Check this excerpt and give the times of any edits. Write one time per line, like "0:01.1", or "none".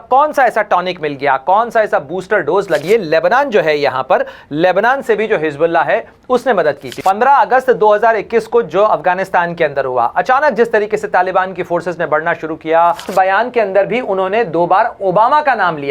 0:02.8
0:06.9
0:13.1

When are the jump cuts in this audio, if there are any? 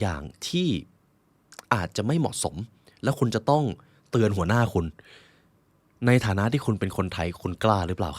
none

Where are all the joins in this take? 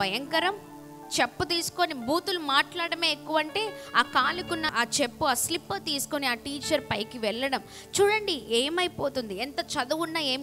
0:04.7

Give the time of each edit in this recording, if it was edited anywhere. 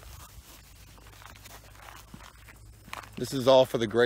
none

